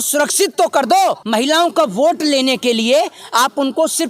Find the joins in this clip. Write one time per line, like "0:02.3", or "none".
0:01.2